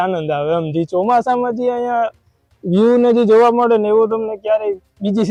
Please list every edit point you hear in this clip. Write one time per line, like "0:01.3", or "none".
none